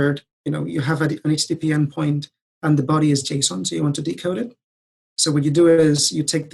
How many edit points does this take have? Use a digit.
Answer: 0